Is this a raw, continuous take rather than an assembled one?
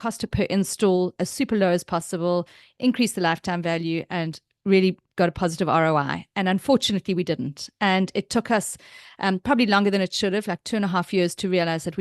yes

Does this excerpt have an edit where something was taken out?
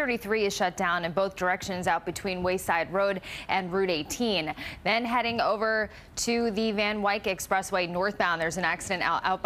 yes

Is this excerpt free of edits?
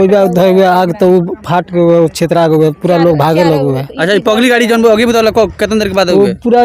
yes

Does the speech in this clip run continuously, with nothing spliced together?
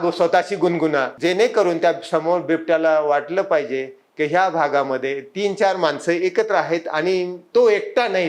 no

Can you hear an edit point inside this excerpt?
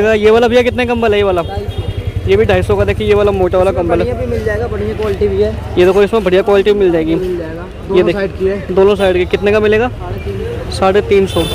no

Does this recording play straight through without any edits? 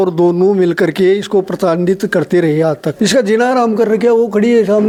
yes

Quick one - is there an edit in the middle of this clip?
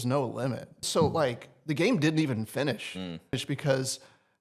yes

